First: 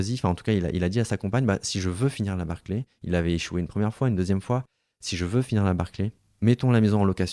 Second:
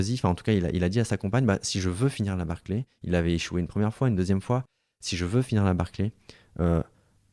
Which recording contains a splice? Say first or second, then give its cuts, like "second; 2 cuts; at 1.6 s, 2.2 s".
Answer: first; 1 cut; at 6.2 s